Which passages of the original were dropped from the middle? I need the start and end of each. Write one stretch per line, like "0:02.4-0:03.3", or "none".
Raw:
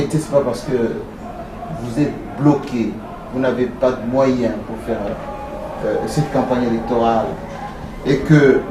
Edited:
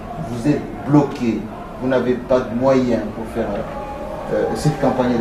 none